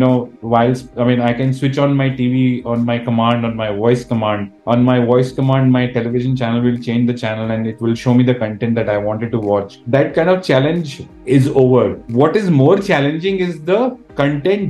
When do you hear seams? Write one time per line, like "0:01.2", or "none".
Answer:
0:09.8